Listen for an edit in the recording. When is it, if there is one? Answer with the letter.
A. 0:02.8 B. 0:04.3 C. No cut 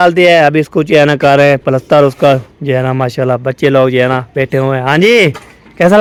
C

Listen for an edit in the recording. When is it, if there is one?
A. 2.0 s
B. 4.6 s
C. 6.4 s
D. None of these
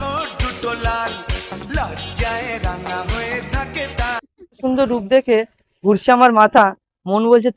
B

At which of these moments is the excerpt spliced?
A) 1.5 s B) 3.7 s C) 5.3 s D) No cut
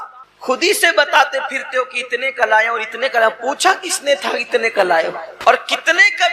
C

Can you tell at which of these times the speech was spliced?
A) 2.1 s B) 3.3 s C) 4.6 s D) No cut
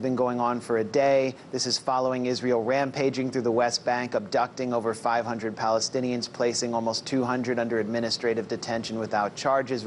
A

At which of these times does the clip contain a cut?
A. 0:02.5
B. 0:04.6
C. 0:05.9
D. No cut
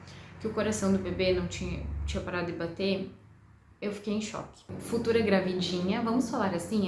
B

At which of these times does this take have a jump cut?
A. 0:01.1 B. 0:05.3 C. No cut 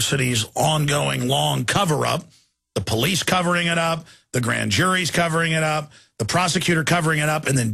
B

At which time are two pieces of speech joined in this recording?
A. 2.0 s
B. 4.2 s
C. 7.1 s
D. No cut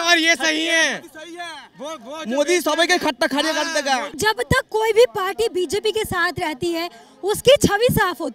B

